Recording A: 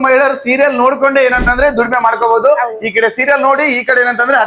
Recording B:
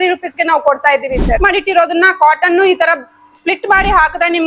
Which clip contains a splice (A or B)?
B